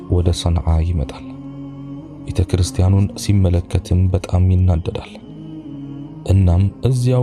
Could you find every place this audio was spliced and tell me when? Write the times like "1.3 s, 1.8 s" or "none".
1.1 s, 2.3 s